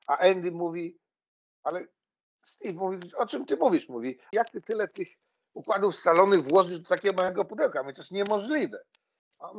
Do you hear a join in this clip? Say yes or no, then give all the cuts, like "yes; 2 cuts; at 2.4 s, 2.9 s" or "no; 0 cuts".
yes; 1 cut; at 4.2 s